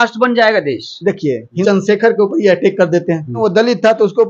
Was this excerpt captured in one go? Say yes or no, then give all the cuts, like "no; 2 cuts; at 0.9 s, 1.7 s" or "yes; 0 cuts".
no; 2 cuts; at 1.5 s, 3.4 s